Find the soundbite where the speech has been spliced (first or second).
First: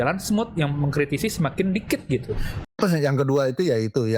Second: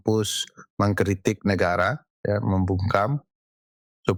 first